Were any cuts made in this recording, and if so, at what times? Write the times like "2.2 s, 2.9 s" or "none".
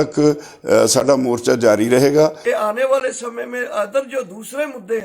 2.4 s